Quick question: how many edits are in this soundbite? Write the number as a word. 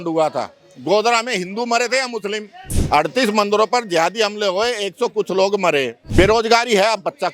two